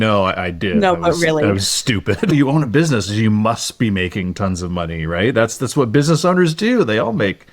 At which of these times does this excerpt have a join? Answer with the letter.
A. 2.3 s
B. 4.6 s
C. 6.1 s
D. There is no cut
A